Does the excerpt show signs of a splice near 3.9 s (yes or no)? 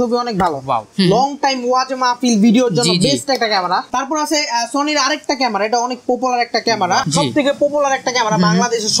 yes